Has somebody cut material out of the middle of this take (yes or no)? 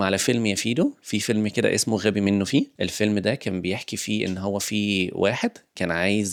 no